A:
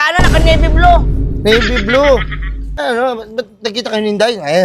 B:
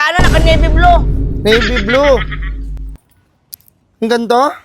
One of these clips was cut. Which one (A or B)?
A